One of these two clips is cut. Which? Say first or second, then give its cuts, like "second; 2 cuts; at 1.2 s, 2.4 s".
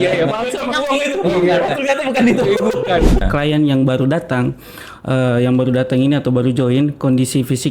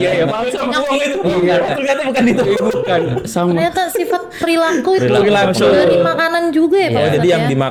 first; 1 cut; at 3.3 s